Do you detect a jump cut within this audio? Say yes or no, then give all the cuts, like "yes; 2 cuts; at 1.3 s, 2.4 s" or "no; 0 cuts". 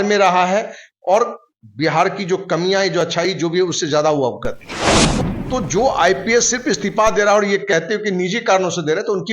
yes; 1 cut; at 5.1 s